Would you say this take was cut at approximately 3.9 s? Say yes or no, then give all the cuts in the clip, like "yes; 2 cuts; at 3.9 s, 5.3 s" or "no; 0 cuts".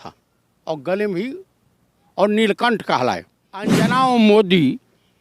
yes; 1 cut; at 3.9 s